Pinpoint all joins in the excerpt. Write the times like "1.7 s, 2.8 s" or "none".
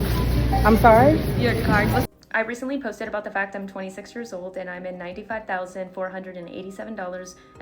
2.1 s